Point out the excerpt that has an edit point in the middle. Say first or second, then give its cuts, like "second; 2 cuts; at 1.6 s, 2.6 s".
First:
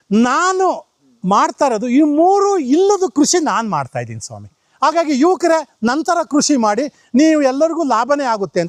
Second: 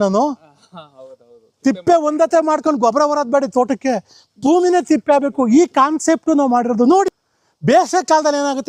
second; 1 cut; at 7.1 s